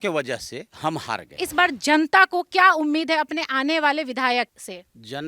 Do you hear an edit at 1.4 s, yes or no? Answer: yes